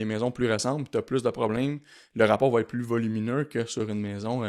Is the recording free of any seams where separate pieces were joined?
yes; 0 cuts

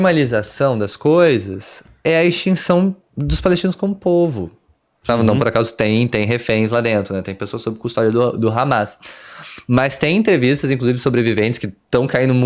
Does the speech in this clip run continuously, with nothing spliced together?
no; 1 cut; at 5.1 s

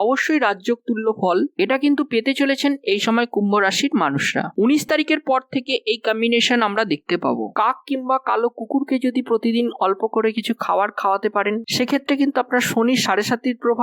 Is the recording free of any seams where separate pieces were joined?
no; 1 cut; at 7.5 s

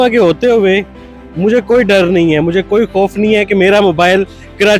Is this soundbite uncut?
yes; 0 cuts

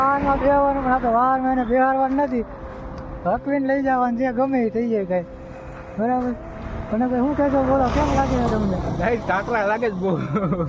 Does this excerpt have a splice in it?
no; 0 cuts

